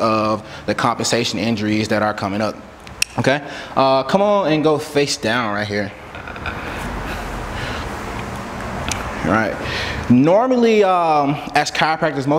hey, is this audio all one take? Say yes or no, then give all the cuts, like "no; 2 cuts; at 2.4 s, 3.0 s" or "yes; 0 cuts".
yes; 0 cuts